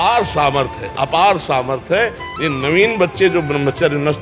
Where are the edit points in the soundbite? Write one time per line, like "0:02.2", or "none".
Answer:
none